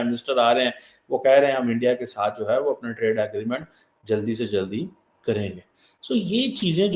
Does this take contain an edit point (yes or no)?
no